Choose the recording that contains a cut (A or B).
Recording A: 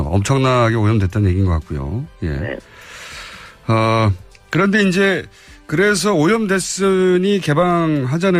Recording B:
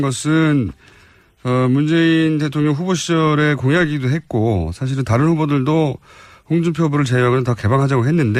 A